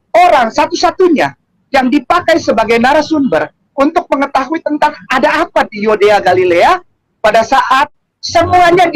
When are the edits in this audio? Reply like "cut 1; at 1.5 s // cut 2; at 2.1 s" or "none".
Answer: cut 1; at 7.9 s